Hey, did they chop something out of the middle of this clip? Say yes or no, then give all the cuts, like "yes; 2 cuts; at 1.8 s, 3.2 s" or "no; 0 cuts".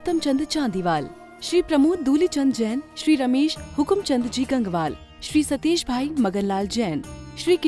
no; 0 cuts